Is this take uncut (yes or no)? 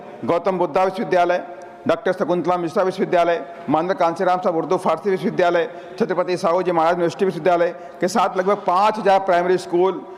yes